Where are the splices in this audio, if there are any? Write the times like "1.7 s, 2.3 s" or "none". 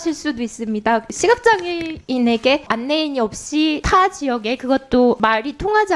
1.1 s, 2.7 s, 3.8 s, 5.2 s